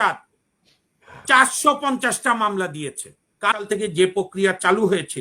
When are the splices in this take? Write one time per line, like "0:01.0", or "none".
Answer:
0:03.6